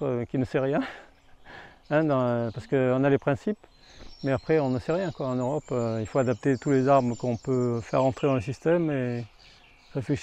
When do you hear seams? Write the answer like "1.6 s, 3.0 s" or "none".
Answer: none